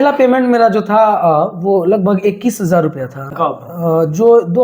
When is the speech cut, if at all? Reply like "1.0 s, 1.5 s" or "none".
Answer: 3.3 s